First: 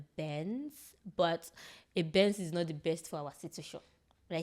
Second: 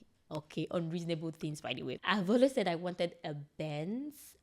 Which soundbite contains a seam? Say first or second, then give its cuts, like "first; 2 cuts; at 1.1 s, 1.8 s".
second; 1 cut; at 2.0 s